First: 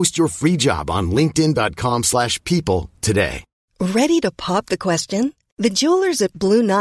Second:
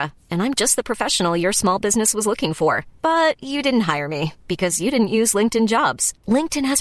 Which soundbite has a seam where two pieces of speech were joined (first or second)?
first